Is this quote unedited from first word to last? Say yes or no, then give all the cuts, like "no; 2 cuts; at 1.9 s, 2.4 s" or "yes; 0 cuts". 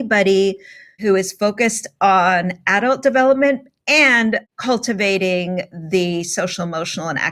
no; 2 cuts; at 1.0 s, 4.4 s